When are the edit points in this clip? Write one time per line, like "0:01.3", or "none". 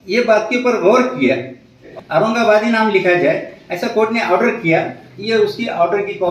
0:01.9